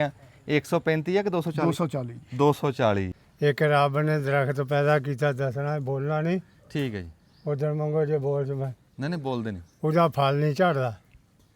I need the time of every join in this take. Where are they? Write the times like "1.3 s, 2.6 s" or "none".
3.2 s